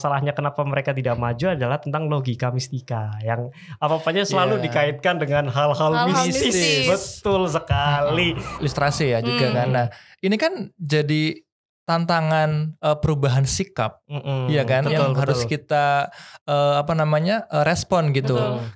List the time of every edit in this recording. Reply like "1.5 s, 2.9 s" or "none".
8.6 s